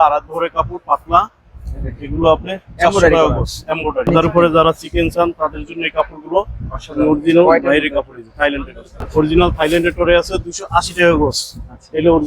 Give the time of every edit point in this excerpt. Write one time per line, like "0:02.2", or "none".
0:04.1
0:09.1

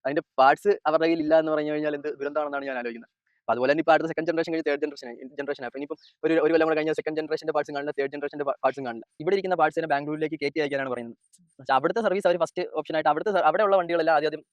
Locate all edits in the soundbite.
0:09.1

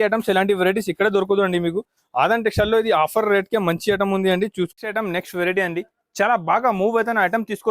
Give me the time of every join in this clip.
0:04.7

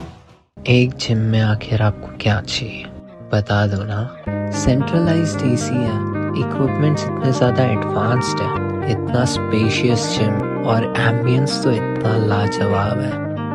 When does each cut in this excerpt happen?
none

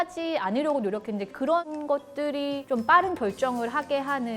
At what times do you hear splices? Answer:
0:02.6

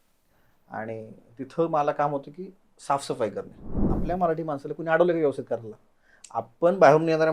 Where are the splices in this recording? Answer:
0:03.9

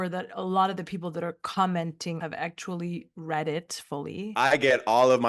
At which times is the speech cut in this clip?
0:02.2
0:04.2

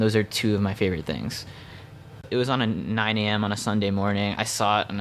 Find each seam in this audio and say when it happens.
0:02.2

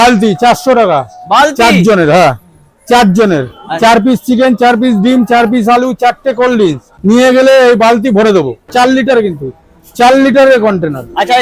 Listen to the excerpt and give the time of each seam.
0:06.9
0:08.7

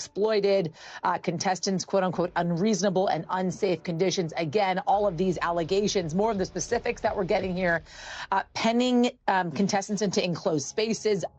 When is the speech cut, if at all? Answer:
none

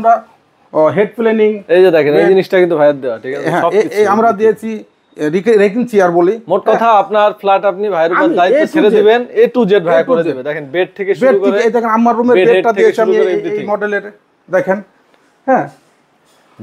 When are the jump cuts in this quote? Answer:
none

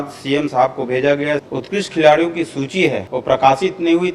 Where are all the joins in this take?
0:01.5
0:03.1

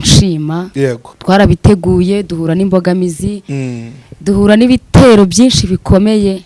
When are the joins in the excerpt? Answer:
0:01.1

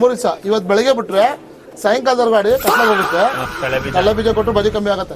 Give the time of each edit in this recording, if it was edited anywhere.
0:03.5

